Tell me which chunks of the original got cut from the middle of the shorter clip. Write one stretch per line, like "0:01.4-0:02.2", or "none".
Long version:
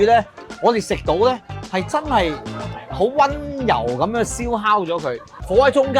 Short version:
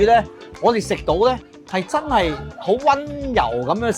0:02.5-0:02.8

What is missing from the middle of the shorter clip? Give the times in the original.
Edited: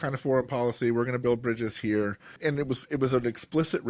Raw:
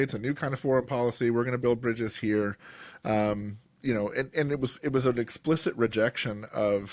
0:02.8-0:04.3

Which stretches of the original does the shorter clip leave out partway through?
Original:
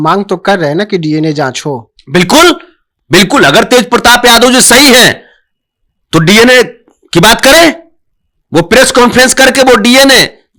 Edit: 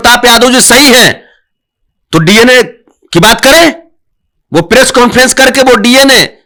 none

